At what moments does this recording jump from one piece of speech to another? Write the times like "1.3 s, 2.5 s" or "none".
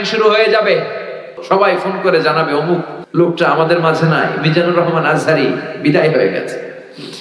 1.3 s, 3.0 s